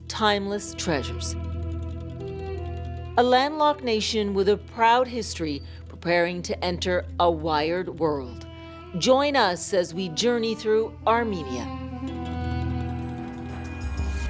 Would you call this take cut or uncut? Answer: uncut